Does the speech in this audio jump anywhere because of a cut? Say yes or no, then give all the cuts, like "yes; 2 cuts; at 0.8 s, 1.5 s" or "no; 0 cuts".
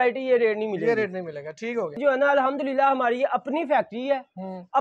yes; 1 cut; at 1.9 s